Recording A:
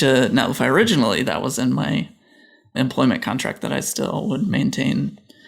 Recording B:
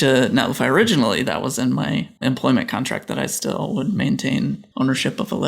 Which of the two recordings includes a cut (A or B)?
B